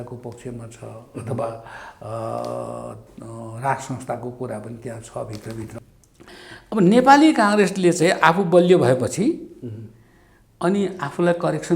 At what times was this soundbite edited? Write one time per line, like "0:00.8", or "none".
0:05.7